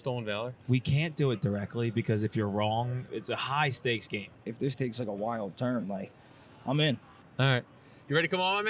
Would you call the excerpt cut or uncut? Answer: cut